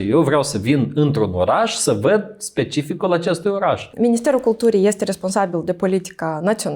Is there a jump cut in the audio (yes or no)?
yes